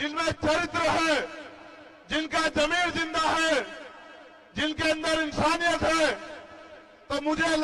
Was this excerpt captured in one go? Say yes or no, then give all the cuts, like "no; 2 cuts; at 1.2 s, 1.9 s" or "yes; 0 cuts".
yes; 0 cuts